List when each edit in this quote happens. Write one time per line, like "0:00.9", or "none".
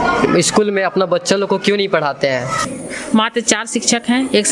0:02.6